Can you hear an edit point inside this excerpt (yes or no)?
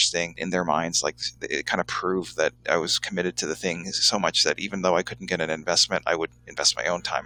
no